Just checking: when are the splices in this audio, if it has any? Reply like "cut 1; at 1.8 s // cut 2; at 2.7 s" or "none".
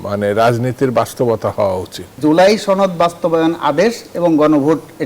cut 1; at 2.1 s